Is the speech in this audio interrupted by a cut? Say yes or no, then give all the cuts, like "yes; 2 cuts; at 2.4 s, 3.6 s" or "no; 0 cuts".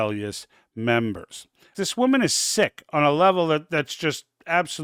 yes; 1 cut; at 1.6 s